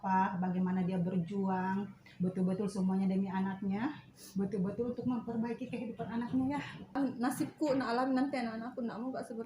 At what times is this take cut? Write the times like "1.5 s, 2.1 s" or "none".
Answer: 7.0 s